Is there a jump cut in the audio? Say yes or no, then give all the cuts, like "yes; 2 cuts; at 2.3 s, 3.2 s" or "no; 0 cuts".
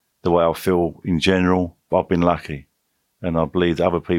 yes; 1 cut; at 1.9 s